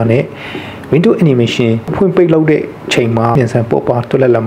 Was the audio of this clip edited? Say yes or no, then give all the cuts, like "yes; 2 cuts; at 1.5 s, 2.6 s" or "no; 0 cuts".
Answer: yes; 2 cuts; at 1.9 s, 3.3 s